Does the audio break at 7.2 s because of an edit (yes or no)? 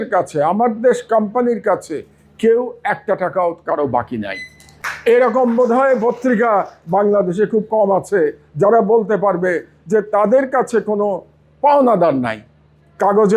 no